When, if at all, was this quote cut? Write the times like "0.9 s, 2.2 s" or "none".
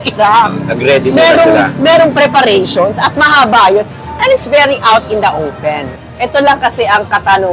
5.9 s